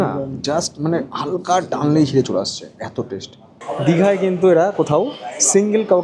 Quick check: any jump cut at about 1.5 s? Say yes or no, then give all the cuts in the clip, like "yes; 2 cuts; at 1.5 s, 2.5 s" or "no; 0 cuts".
no; 1 cut; at 3.5 s